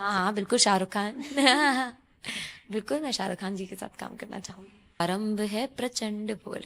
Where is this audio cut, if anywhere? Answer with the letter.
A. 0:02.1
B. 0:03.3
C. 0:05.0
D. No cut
C